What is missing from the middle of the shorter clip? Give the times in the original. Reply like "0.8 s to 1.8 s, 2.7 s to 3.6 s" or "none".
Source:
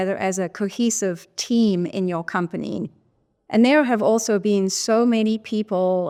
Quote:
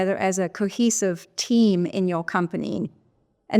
none